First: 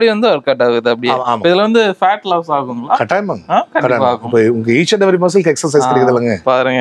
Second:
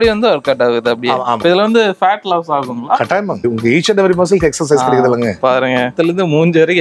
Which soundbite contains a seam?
second; 1 cut; at 3.4 s

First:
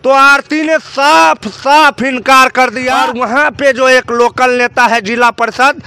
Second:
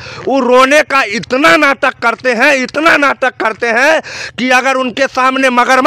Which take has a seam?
first; 1 cut; at 3.0 s

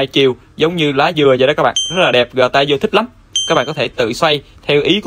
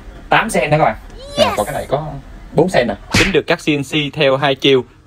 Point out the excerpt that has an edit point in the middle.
second; 1 cut; at 3.0 s

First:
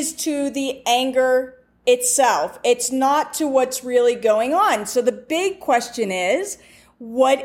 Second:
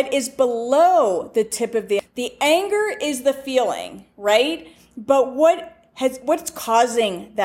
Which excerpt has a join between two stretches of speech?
second; 1 cut; at 2.0 s

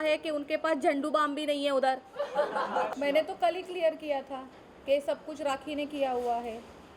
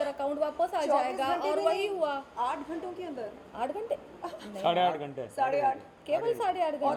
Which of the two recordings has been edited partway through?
first; 1 cut; at 2.9 s

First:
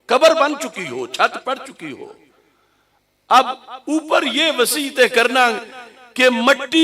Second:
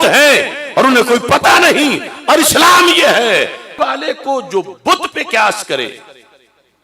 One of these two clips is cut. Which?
second; 1 cut; at 3.7 s

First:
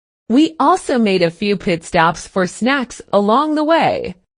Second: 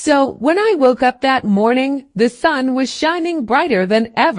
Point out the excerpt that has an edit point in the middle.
second; 1 cut; at 1.9 s

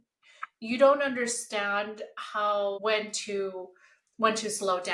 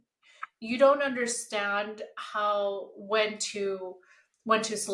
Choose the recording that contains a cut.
first; 1 cut; at 2.8 s

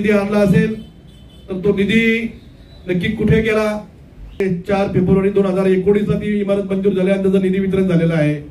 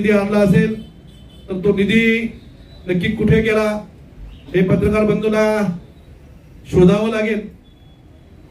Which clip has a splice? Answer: first; 1 cut; at 4.4 s

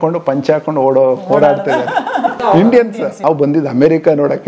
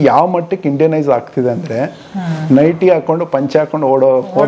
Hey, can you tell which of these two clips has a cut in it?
first; 2 cuts; at 2.4 s, 3.1 s

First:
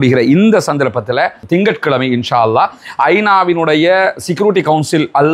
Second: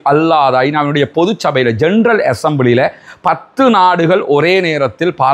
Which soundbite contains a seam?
first; 1 cut; at 1.4 s

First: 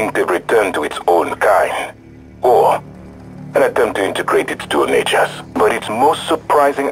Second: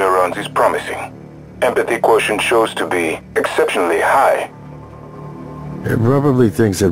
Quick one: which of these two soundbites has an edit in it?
second; 2 cuts; at 4.6 s, 5.8 s

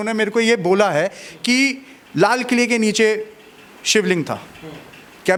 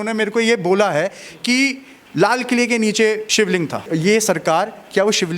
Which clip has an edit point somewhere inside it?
second; 1 cut; at 3.8 s

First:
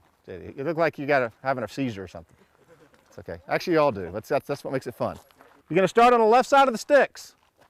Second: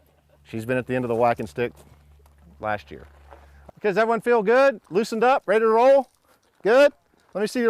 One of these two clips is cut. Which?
second; 1 cut; at 5.6 s

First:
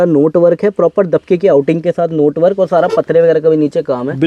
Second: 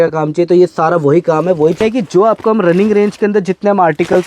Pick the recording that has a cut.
second; 1 cut; at 1.8 s

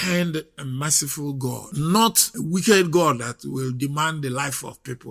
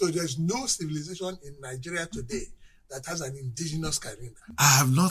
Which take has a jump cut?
first; 2 cuts; at 1.6 s, 2.3 s

